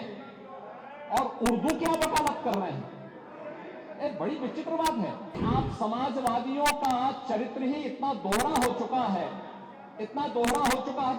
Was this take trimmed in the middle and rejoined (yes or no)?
yes